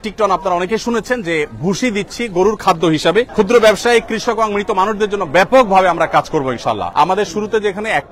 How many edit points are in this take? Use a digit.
2